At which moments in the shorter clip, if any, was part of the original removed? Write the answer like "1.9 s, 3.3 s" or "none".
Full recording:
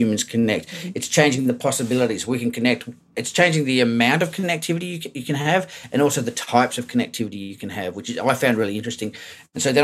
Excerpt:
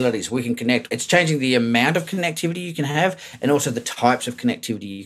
0.9 s, 2.7 s